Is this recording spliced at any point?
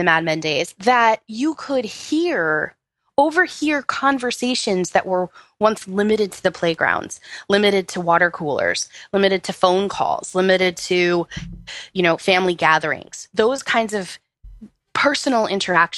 no; 0 cuts

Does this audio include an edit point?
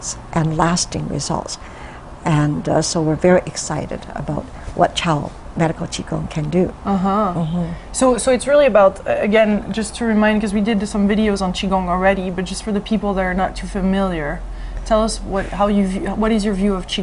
yes; 1 cut; at 5.8 s

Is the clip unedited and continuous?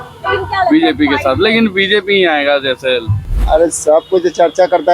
no; 1 cut; at 3.3 s

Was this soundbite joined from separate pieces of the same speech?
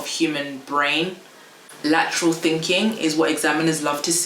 yes; 1 cut; at 1.7 s

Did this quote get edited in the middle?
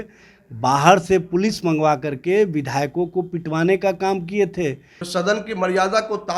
yes; 1 cut; at 4.9 s

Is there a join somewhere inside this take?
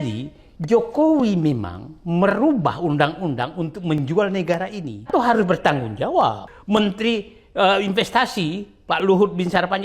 yes; 2 cuts; at 5.1 s, 6.5 s

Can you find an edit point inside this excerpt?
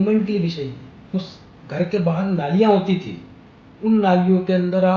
yes; 1 cut; at 1.1 s

